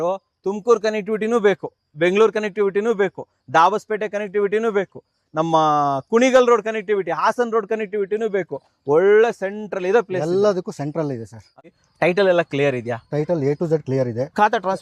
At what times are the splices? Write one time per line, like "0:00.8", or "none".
0:11.7